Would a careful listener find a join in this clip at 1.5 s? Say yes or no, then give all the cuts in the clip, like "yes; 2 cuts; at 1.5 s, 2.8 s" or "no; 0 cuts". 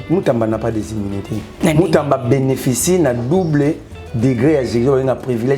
yes; 1 cut; at 1.5 s